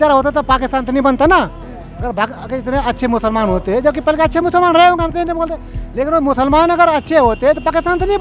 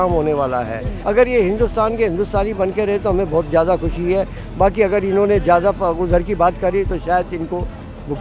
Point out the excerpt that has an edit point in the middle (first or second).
second